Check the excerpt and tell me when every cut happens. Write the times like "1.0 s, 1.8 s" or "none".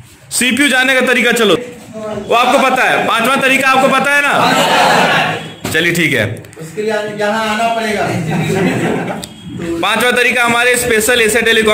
1.6 s